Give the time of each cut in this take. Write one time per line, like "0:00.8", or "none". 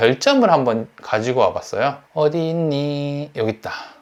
none